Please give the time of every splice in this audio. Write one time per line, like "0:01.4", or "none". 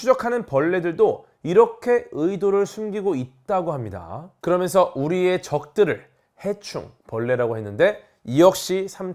none